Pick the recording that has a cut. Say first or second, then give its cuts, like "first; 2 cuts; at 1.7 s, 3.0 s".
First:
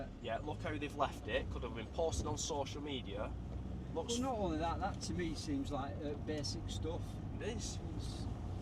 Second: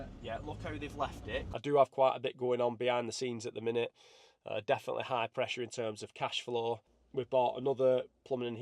second; 2 cuts; at 1.6 s, 7.0 s